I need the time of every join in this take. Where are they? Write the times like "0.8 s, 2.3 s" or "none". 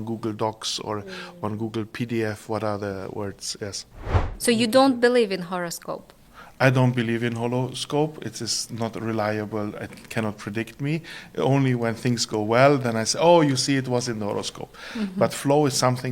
4.3 s